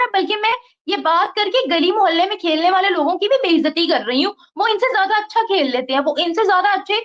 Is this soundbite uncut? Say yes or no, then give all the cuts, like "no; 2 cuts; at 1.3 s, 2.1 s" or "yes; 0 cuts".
yes; 0 cuts